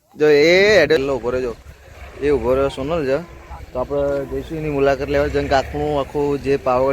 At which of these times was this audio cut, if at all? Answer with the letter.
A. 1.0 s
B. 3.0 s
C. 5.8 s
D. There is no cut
A